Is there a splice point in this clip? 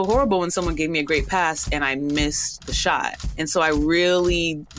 no; 0 cuts

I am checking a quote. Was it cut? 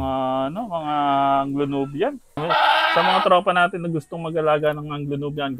yes; 1 cut; at 2.4 s

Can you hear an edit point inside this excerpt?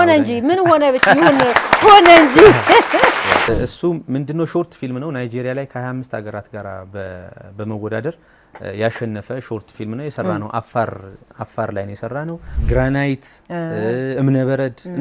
yes; 2 cuts; at 3.5 s, 12.4 s

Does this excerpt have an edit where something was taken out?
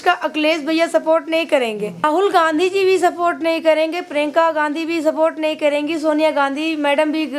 yes; 1 cut; at 2.0 s

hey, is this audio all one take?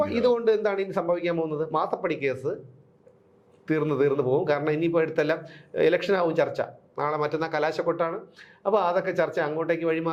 yes; 0 cuts

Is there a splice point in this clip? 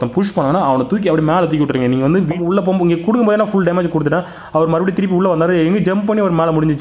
yes; 1 cut; at 2.3 s

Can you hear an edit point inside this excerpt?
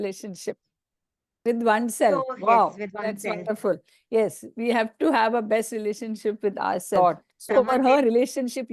yes; 1 cut; at 7.0 s

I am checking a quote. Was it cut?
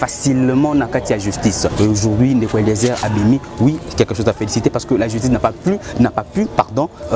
yes; 1 cut; at 1.7 s

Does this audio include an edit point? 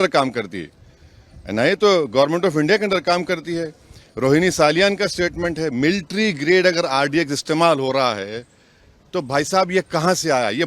no; 0 cuts

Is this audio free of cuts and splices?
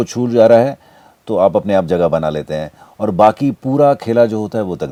yes; 0 cuts

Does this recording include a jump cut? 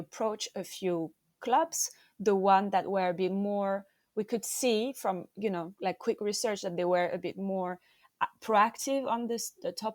no; 0 cuts

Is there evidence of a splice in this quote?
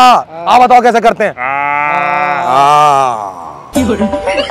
no; 0 cuts

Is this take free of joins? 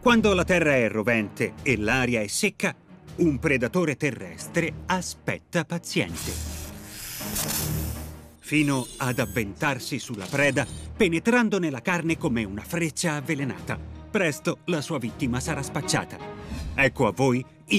yes; 0 cuts

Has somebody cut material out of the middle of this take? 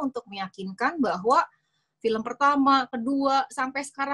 no; 0 cuts

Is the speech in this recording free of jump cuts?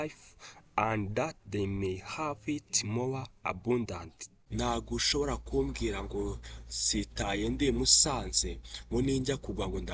no; 1 cut; at 4.4 s

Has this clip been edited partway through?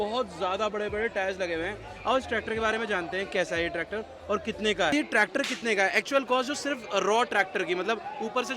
yes; 1 cut; at 4.9 s

